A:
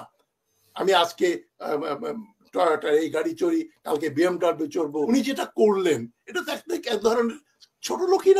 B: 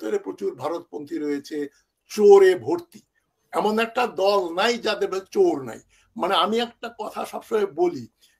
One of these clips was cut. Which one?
A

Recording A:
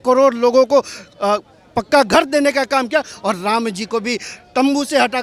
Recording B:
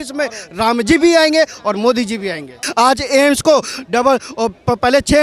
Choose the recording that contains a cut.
B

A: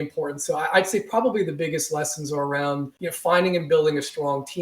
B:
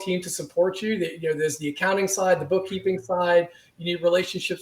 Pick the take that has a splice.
A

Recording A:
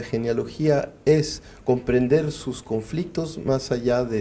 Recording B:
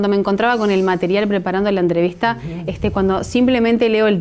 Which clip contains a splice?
B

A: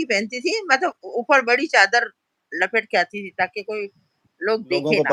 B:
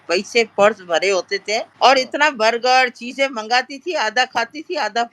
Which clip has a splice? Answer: B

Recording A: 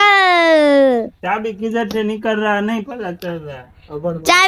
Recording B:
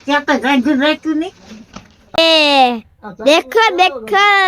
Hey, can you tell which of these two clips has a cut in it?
B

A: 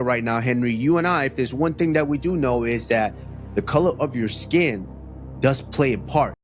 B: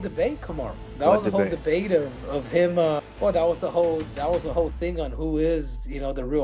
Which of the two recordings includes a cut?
B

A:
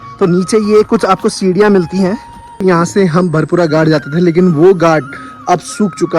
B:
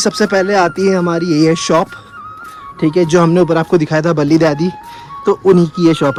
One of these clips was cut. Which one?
A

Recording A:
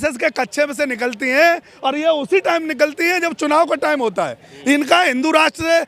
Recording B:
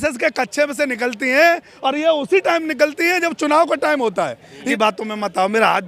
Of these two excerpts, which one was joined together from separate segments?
B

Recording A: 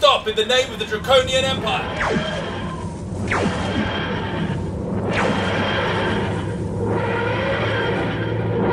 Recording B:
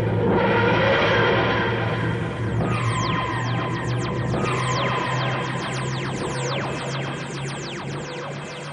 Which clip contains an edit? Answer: A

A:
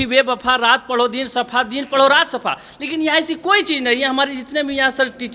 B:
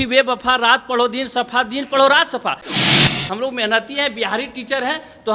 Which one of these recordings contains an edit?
B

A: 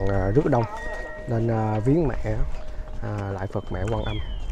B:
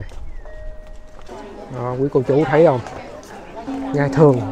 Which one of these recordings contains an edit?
B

